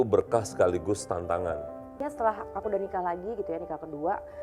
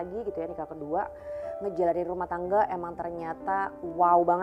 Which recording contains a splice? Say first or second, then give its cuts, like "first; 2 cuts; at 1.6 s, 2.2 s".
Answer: first; 1 cut; at 2.1 s